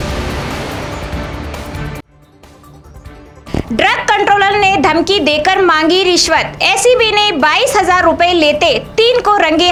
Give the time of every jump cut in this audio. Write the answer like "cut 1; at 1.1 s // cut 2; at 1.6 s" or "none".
none